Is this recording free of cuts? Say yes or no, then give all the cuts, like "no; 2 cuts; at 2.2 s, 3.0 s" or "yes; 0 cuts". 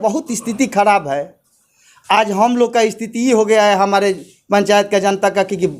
yes; 0 cuts